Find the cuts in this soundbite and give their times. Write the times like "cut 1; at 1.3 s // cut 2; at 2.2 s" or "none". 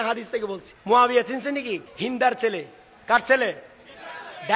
cut 1; at 0.9 s // cut 2; at 1.9 s